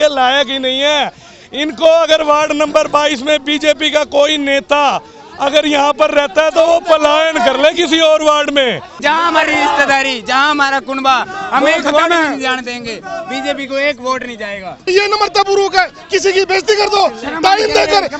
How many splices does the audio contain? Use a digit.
2